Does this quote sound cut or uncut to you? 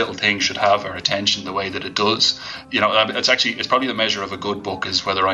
cut